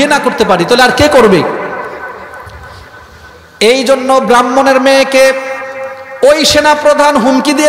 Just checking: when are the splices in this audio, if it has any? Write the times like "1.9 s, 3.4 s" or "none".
none